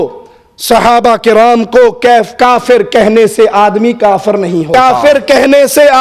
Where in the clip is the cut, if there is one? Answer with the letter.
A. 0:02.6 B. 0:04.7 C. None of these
B